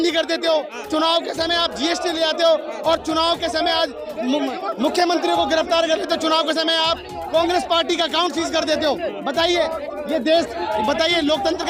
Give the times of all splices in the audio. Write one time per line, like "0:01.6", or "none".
none